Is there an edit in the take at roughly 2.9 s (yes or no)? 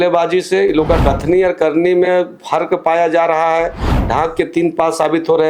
no